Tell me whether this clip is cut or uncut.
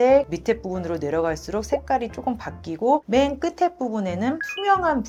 uncut